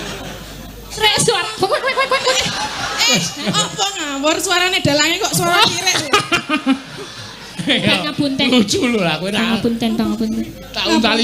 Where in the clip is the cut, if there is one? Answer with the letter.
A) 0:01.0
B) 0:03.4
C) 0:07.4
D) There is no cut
A